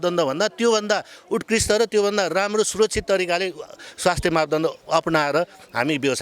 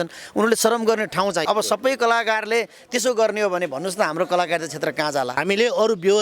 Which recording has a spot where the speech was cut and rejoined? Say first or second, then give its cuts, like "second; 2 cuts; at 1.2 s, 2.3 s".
second; 2 cuts; at 1.4 s, 5.4 s